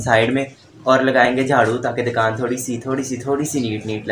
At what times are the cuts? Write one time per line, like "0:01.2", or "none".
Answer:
none